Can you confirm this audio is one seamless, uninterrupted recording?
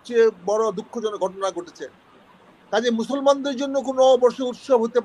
yes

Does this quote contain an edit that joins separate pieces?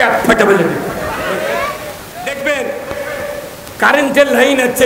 yes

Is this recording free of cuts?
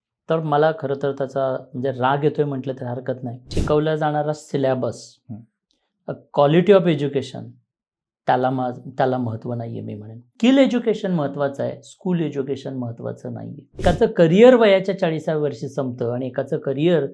no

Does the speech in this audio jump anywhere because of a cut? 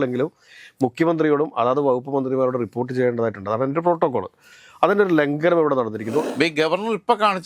yes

